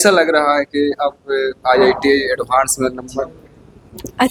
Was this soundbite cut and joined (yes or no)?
no